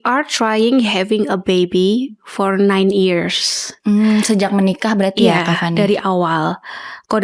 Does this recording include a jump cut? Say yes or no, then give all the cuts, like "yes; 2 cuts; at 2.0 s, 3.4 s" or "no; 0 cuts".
no; 0 cuts